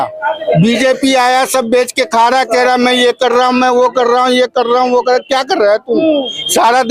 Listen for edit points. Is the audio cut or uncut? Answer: uncut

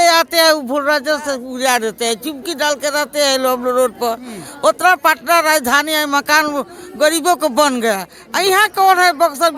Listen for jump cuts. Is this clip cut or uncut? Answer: uncut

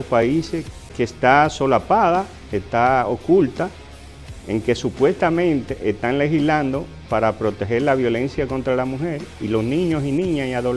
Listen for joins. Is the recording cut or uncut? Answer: cut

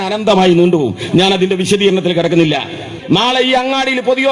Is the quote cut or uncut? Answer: cut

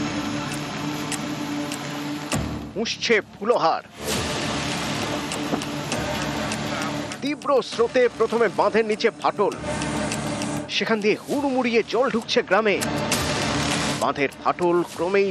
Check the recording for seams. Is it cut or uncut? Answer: cut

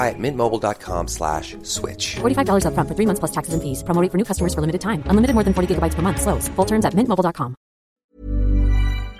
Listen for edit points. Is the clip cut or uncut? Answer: cut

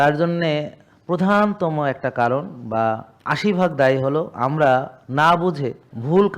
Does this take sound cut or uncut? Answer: uncut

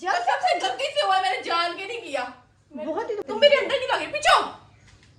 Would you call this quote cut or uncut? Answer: uncut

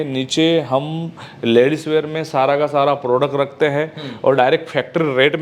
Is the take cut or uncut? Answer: uncut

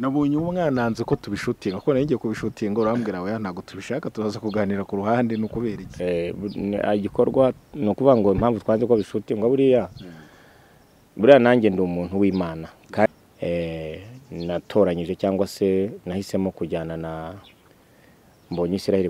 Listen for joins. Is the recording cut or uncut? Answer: cut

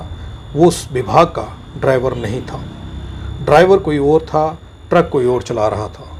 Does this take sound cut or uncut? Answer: uncut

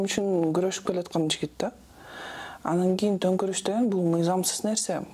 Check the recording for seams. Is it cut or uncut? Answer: uncut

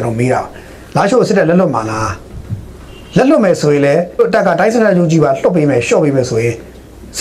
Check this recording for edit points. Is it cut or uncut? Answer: cut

